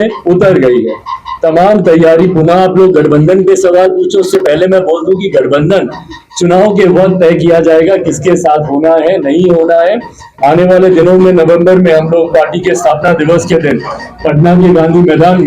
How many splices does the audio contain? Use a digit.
1